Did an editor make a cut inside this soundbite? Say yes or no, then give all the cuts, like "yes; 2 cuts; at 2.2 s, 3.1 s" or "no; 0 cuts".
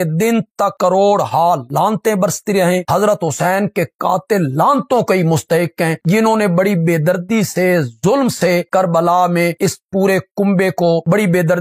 no; 0 cuts